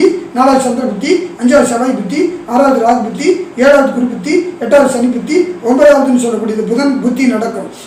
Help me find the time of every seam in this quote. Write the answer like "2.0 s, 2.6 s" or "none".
none

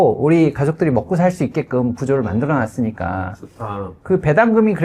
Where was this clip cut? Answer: none

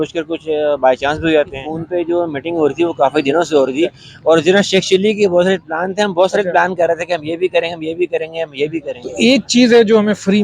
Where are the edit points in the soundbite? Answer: 1.7 s, 9.0 s

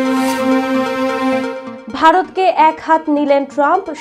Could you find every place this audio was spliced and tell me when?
1.6 s

